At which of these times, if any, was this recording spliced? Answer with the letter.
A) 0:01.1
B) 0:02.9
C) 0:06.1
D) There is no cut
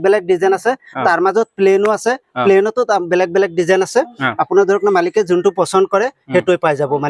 D